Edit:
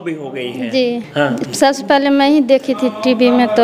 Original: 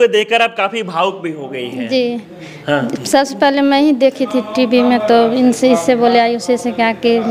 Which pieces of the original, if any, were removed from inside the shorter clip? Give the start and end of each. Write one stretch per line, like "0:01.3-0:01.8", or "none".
0:02.2-0:02.6